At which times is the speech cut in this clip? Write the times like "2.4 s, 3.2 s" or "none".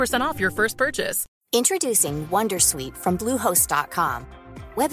1.3 s